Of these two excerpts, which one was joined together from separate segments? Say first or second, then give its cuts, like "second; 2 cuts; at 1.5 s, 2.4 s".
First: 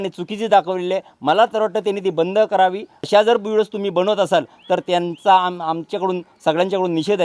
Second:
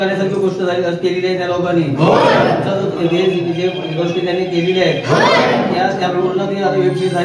first; 1 cut; at 2.9 s